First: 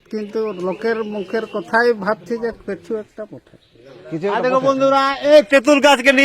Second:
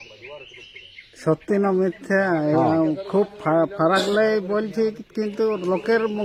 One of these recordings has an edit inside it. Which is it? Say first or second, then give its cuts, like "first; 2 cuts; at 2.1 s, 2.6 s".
first; 1 cut; at 4.3 s